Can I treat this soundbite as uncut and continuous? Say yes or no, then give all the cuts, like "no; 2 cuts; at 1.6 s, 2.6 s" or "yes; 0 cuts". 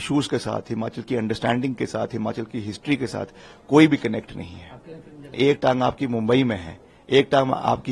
no; 1 cut; at 5.3 s